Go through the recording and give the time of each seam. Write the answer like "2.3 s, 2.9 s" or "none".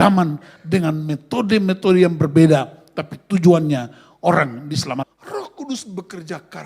5.1 s